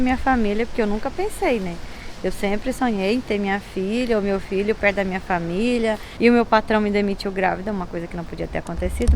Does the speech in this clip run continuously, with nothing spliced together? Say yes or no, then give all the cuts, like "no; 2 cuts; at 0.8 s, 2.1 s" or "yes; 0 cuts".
no; 1 cut; at 6.1 s